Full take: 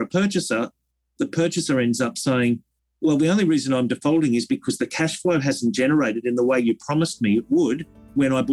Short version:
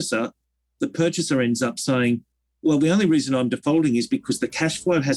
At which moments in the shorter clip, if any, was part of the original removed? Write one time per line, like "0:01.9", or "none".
none